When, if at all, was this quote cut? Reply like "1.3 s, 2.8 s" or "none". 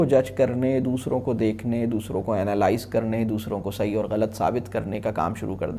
none